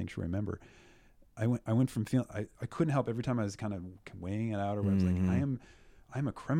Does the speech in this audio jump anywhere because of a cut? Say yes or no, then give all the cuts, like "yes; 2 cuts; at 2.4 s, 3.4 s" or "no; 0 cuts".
no; 0 cuts